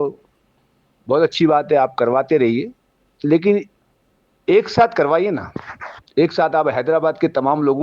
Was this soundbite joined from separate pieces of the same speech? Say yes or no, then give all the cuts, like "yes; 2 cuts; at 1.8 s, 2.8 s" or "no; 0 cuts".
yes; 1 cut; at 6.3 s